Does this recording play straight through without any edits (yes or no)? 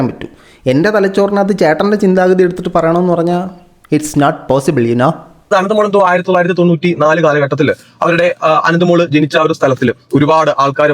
no